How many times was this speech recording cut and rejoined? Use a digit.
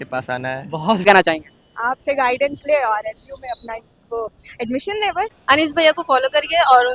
2